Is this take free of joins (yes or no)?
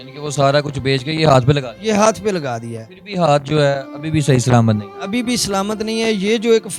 yes